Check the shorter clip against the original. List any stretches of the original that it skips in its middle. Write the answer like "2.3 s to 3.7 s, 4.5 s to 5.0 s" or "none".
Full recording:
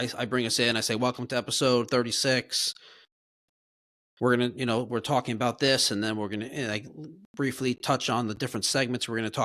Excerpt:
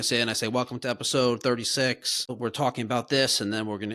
2.8 s to 4.9 s